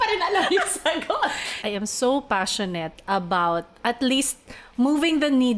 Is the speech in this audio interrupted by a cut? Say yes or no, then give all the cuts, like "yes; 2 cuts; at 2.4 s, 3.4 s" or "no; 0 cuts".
yes; 1 cut; at 1.5 s